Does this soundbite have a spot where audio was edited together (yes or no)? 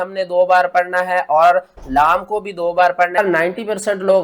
yes